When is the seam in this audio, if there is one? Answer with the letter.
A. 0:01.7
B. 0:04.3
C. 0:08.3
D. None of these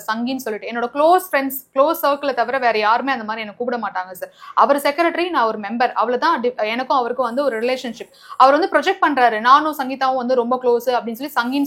D